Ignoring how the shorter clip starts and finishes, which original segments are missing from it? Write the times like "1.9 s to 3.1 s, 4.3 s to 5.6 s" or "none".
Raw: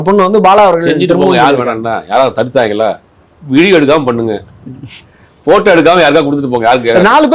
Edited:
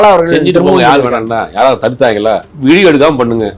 3.0 s to 3.4 s